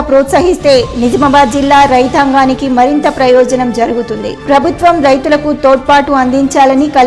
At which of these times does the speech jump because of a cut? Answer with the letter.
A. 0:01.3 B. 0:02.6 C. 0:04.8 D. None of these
D